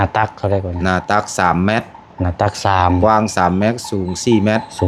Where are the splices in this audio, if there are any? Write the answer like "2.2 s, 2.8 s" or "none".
none